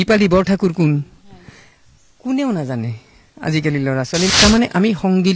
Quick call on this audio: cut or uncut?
cut